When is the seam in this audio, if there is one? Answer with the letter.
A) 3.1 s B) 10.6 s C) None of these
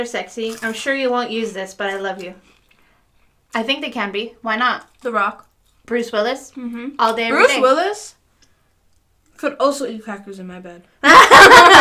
C